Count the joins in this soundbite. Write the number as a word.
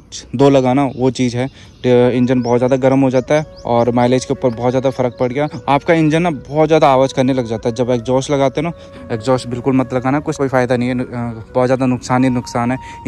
three